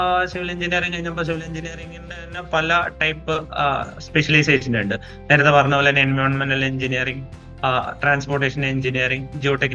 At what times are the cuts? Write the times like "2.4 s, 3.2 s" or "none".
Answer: none